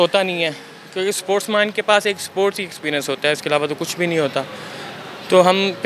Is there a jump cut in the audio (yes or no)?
no